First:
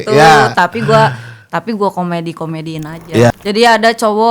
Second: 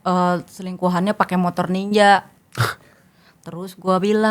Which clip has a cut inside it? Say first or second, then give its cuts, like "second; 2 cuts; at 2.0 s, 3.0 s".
first; 1 cut; at 3.3 s